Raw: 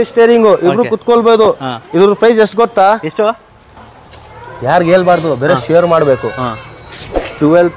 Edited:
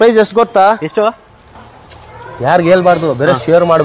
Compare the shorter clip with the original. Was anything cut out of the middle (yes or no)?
no